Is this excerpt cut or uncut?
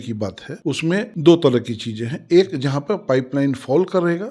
uncut